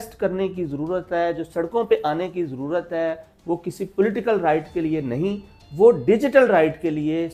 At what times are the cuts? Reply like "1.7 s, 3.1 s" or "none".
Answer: none